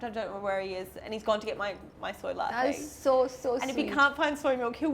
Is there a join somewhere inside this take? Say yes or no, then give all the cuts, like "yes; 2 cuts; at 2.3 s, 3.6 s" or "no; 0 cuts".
no; 0 cuts